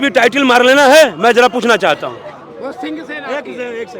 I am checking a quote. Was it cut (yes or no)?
no